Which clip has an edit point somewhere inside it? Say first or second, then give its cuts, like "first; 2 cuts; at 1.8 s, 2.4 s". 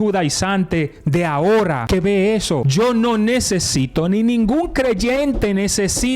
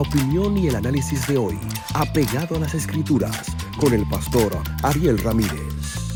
first; 2 cuts; at 1.8 s, 2.7 s